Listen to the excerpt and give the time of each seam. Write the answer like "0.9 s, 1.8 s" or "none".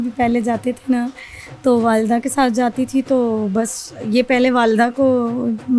none